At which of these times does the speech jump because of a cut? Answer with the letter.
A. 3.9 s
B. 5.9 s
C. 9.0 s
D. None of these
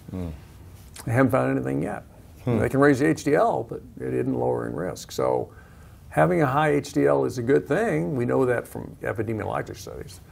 C